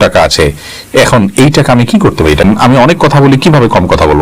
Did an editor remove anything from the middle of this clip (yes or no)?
yes